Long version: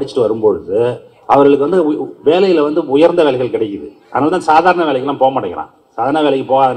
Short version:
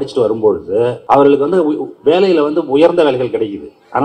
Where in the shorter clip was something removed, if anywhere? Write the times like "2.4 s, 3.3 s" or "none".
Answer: 1.0 s